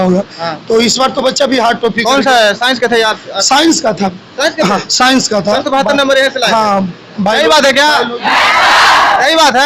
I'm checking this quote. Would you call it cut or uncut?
uncut